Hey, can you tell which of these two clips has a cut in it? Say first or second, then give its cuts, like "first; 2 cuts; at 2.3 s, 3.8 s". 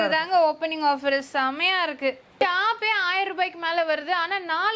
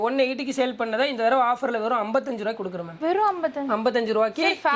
first; 1 cut; at 2.4 s